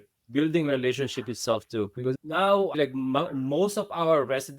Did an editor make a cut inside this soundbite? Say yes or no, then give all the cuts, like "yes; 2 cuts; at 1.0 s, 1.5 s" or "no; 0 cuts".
yes; 1 cut; at 2.7 s